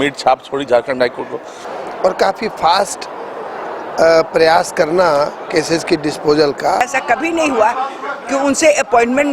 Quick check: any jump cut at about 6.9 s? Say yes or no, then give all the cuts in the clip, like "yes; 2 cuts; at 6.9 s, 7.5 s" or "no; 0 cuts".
yes; 2 cuts; at 1.6 s, 6.9 s